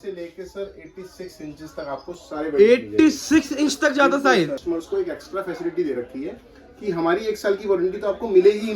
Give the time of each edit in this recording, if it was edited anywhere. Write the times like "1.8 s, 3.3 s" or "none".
4.6 s